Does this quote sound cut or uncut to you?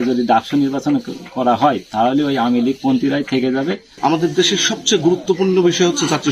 cut